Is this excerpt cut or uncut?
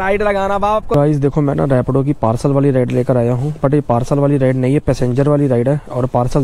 cut